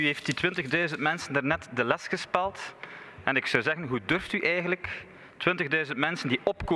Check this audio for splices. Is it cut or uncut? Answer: uncut